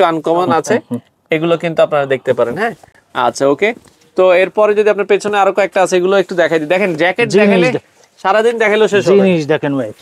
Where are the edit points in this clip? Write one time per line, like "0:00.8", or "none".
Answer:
none

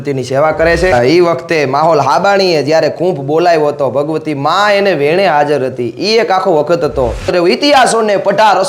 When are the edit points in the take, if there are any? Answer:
0:00.9
0:07.3

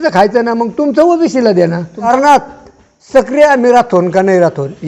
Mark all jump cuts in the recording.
0:02.1

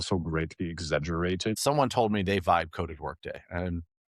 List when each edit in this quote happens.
0:01.6

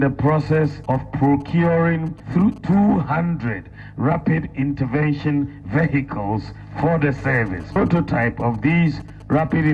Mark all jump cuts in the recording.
none

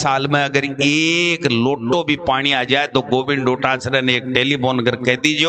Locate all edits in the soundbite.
none

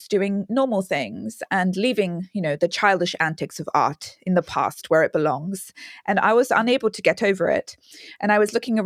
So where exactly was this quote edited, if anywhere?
none

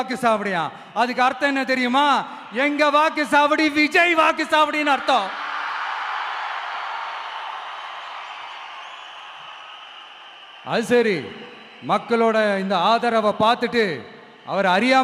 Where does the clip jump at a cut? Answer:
none

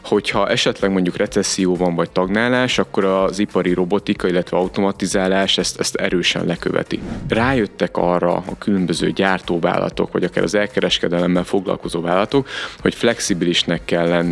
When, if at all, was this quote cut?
0:07.2

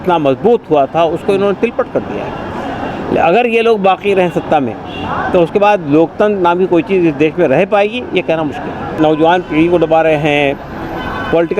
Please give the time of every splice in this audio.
0:08.9

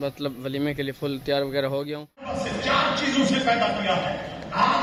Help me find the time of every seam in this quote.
0:02.4

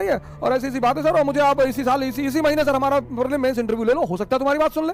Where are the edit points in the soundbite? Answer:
none

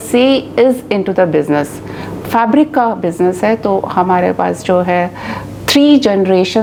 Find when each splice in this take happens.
none

